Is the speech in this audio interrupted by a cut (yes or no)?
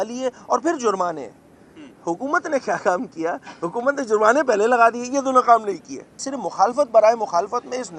yes